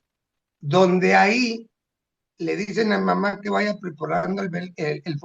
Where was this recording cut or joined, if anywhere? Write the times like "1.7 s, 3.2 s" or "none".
none